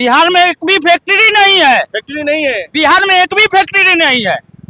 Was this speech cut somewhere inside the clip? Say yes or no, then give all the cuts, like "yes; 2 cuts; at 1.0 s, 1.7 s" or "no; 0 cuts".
no; 0 cuts